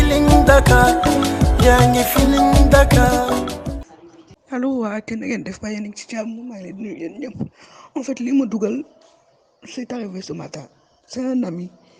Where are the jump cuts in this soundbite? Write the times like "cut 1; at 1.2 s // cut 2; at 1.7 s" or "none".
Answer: cut 1; at 3.6 s